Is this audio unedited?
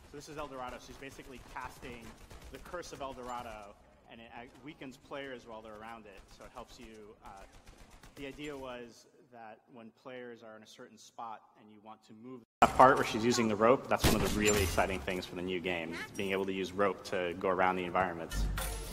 no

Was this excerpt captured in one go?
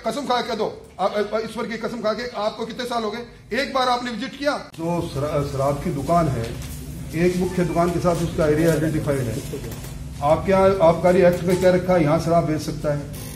yes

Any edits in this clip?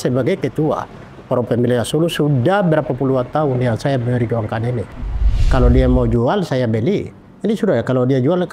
yes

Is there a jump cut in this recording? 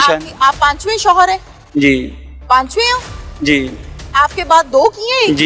no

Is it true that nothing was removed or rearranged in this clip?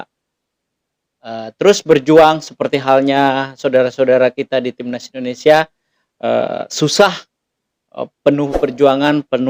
yes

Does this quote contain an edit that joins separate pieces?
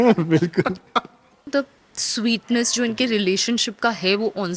yes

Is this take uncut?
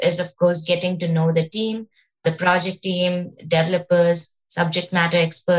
no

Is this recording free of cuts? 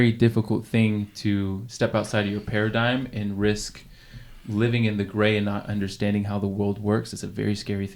yes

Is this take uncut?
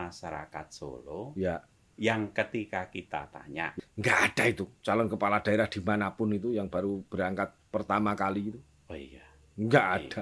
no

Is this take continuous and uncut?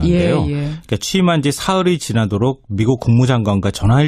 yes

